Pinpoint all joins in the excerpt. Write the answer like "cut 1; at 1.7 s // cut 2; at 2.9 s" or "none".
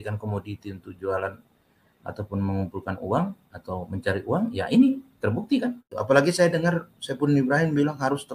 cut 1; at 5.9 s